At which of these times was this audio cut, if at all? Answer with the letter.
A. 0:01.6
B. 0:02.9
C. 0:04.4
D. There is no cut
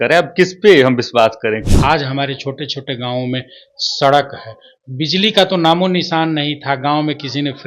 A